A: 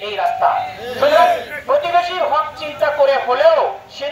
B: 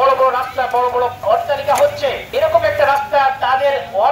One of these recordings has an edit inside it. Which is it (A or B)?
B